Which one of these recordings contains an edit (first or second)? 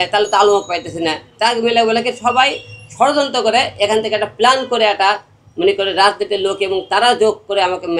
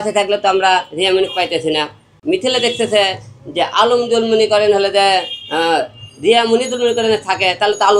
second